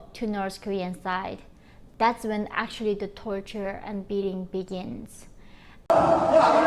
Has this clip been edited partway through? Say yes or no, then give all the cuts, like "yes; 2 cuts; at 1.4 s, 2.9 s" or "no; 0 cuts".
yes; 1 cut; at 5.7 s